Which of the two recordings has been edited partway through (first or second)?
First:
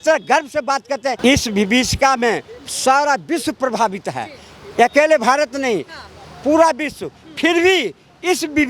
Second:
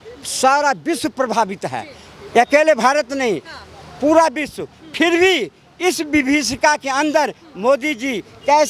first